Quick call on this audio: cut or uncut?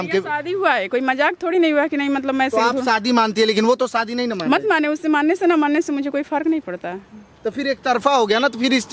uncut